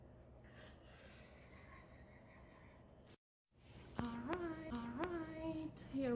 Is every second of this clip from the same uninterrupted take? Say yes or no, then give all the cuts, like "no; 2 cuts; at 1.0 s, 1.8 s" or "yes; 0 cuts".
yes; 0 cuts